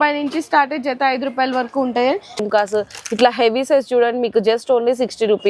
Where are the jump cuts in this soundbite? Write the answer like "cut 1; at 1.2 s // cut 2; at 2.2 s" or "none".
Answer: cut 1; at 2.4 s